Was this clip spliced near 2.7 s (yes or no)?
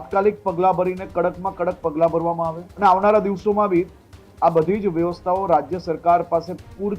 yes